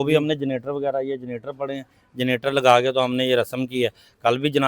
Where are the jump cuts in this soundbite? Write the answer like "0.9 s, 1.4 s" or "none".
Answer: none